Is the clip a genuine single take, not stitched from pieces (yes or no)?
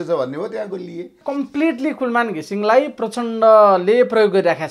no